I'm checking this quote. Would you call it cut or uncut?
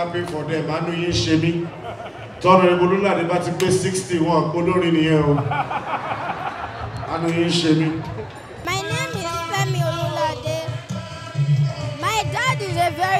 cut